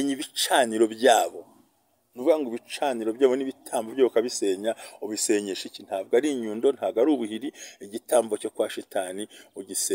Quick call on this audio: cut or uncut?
uncut